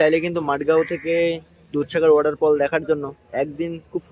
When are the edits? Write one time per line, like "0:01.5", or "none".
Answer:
none